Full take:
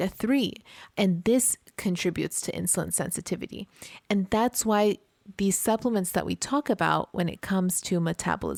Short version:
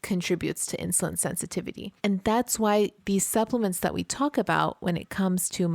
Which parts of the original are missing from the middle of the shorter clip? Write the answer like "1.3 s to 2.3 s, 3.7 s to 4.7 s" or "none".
3.6 s to 3.9 s, 5.0 s to 5.3 s